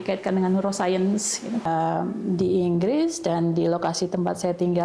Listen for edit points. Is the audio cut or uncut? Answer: cut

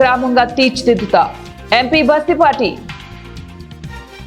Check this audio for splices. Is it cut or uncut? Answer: cut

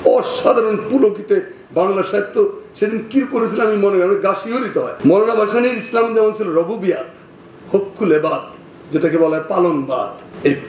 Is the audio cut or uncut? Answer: cut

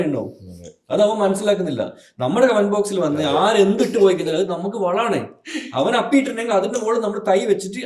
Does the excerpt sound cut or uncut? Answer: uncut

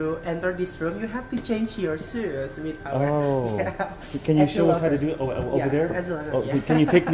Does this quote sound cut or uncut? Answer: uncut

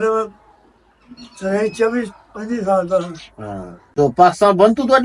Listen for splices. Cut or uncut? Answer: cut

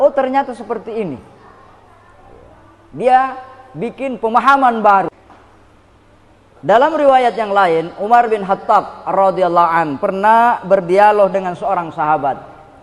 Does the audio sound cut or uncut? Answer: cut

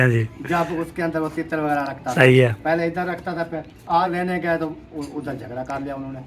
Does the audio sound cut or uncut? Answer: cut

